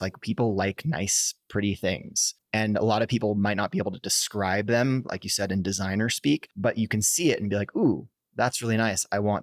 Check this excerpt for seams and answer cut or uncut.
cut